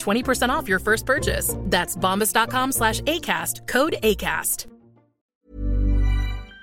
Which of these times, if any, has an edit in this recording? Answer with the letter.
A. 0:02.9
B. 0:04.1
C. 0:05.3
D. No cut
C